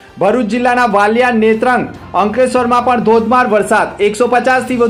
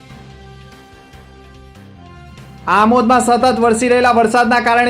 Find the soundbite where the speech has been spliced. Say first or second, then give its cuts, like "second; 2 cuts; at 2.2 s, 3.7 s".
second; 1 cut; at 1.1 s